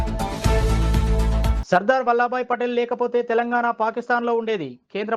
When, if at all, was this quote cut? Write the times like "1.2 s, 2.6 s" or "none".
1.5 s